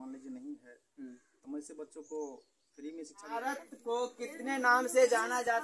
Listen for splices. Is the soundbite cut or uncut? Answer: cut